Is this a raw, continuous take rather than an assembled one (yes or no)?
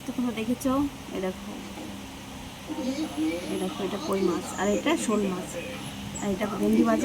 yes